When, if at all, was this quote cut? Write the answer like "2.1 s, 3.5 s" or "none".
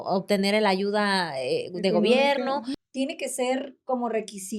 2.8 s